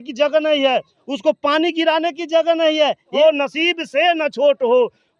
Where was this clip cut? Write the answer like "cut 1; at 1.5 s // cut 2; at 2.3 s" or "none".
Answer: cut 1; at 3.2 s